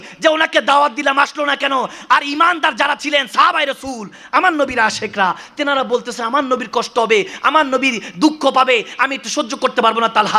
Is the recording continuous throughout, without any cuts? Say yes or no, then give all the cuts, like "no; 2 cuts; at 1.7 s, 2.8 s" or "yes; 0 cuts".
yes; 0 cuts